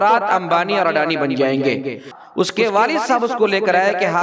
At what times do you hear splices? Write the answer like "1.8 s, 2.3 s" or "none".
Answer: 2.1 s